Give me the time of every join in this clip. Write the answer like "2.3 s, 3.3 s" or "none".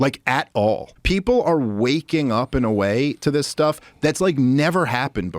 0.9 s

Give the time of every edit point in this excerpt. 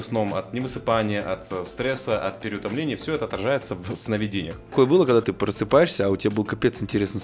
4.7 s

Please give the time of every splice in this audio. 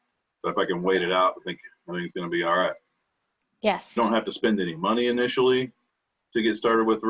4.0 s

